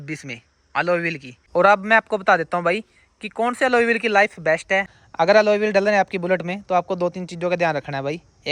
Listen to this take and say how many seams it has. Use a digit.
2